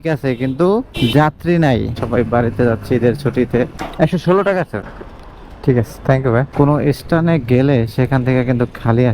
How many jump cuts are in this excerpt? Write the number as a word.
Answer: three